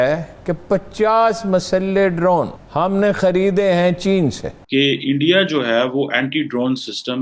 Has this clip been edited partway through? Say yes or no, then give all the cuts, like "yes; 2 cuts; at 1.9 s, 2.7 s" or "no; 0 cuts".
yes; 2 cuts; at 2.6 s, 4.5 s